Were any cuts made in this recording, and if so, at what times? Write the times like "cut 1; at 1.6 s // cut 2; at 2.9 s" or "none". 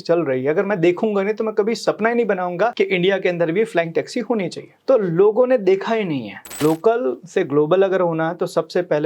cut 1; at 2.7 s // cut 2; at 4.7 s // cut 3; at 6.6 s